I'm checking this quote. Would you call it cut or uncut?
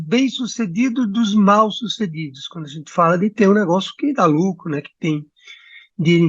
uncut